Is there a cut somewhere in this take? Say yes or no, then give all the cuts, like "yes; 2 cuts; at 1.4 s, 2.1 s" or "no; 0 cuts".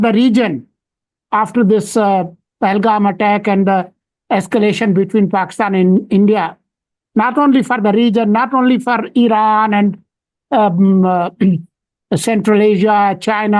no; 0 cuts